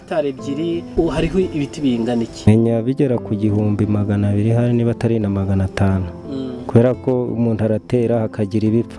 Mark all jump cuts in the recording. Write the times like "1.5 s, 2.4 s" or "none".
0.9 s, 2.5 s